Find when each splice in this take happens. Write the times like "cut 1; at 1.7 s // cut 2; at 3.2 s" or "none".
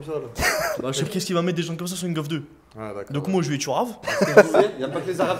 cut 1; at 1.1 s // cut 2; at 4.0 s